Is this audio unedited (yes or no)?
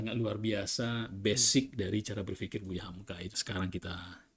no